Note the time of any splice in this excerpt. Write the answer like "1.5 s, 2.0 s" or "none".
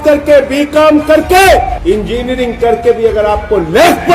1.7 s